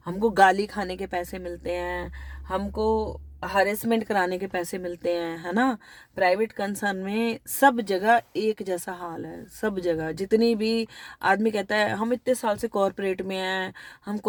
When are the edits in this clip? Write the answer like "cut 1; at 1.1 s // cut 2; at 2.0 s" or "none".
none